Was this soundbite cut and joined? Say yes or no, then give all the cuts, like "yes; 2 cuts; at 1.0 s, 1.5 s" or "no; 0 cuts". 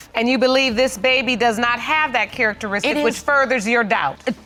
no; 0 cuts